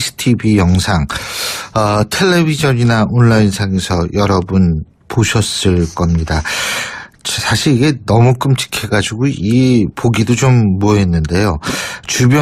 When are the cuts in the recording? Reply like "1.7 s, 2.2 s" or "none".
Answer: none